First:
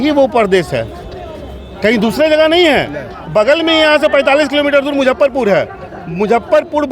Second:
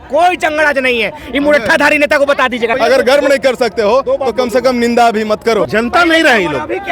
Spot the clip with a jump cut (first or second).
second